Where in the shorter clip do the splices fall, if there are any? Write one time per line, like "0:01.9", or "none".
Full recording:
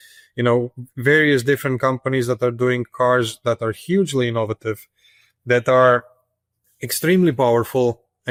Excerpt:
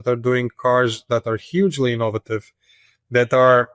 none

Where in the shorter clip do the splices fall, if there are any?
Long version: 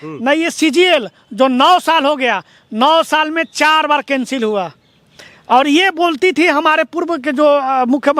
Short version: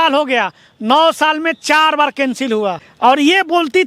0:02.9

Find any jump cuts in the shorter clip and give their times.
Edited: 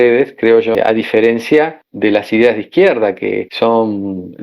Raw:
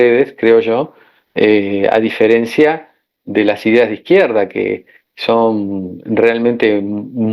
0:00.8
0:01.8
0:03.5

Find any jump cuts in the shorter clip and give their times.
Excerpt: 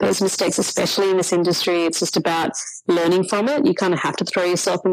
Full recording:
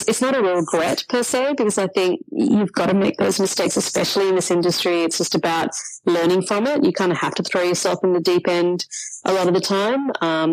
none

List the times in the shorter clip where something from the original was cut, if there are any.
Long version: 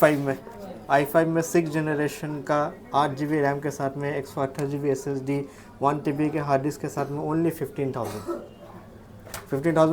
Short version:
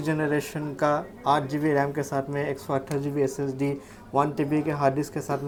none

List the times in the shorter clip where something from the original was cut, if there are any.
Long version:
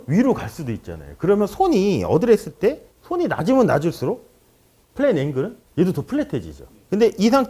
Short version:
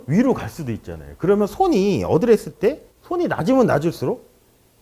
none

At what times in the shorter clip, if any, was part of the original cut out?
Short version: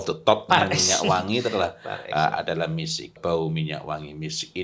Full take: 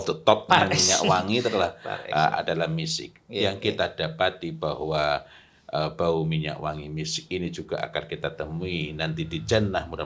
0:03.2

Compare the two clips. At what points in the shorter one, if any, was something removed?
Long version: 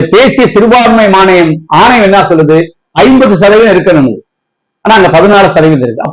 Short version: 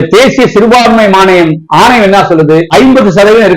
0:02.7

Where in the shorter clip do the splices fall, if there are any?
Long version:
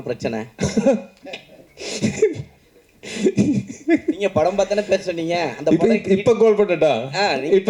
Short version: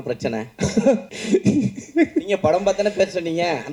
0:01.1

